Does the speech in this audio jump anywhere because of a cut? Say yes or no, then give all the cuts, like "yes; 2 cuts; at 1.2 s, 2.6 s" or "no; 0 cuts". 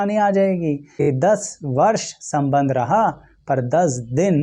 yes; 1 cut; at 0.9 s